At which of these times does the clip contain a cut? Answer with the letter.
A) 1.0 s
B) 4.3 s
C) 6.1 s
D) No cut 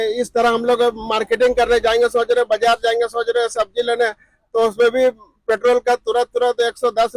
D